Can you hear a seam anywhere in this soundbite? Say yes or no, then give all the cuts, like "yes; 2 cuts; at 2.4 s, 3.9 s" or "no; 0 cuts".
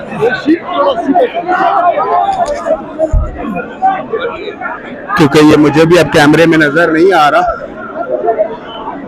no; 0 cuts